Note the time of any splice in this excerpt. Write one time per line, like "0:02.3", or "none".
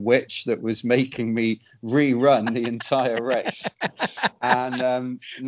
none

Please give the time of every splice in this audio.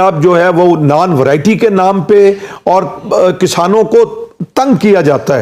none

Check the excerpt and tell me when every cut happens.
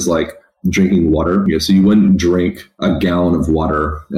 0:01.4
0:02.7

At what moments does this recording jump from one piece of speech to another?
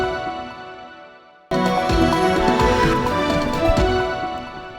0:01.5

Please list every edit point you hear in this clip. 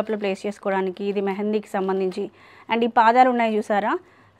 none

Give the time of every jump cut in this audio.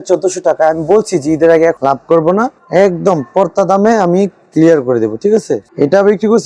none

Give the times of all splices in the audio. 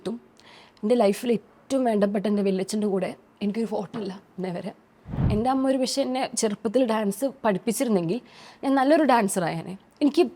0:05.2

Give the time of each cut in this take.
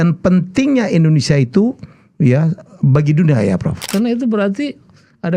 0:03.9

